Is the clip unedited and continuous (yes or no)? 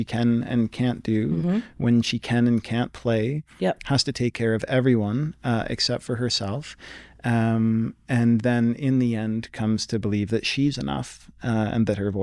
yes